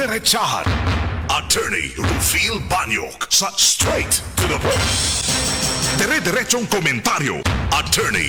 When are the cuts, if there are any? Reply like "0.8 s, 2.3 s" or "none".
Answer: none